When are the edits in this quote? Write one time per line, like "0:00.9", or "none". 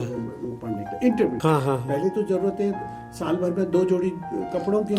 0:01.4

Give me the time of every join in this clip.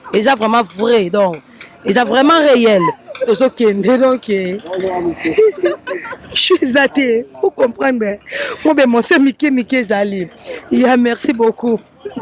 none

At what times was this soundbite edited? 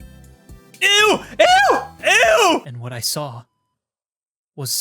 0:02.8

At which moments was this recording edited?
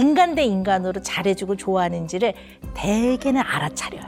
none

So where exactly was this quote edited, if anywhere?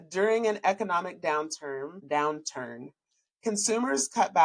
0:02.0

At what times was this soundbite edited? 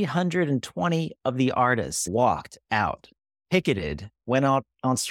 none

